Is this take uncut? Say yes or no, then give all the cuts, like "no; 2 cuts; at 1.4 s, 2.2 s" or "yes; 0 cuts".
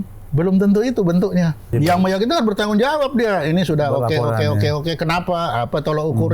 no; 1 cut; at 1.7 s